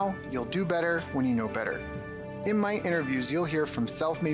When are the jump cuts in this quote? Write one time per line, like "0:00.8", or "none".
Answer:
none